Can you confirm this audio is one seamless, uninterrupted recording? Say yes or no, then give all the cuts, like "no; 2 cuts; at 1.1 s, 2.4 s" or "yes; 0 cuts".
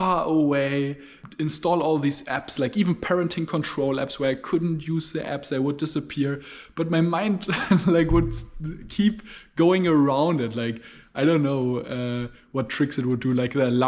yes; 0 cuts